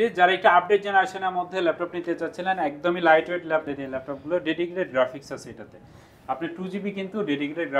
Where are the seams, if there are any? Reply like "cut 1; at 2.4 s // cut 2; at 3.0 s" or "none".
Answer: cut 1; at 3.6 s